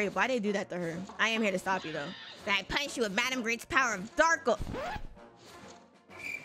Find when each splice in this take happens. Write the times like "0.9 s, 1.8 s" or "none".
1.1 s